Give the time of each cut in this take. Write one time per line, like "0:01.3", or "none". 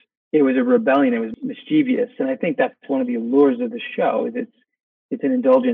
0:01.3